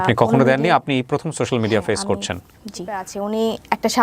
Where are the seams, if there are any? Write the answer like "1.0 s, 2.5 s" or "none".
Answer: 3.1 s